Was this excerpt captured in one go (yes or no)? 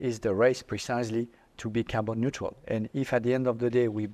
yes